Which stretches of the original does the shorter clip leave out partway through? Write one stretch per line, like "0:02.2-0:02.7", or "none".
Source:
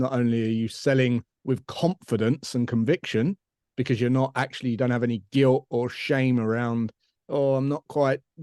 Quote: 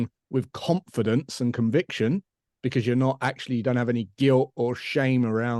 none